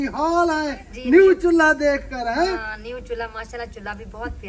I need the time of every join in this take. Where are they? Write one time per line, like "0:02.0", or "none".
none

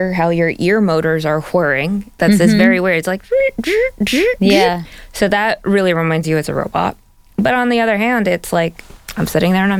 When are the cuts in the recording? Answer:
none

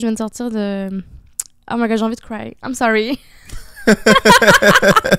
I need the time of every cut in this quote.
none

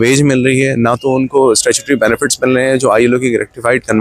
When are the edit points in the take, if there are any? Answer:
none

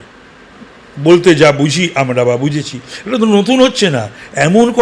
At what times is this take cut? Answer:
none

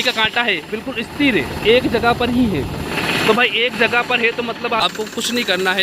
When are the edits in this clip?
0:04.8

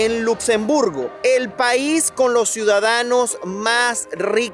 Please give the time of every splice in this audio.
none

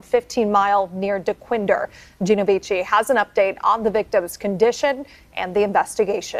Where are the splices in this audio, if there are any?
none

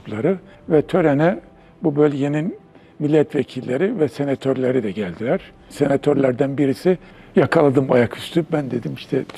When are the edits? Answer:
none

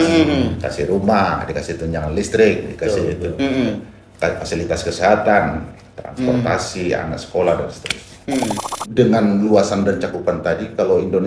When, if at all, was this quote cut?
0:08.8

